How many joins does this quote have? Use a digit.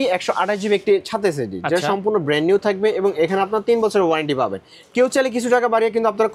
0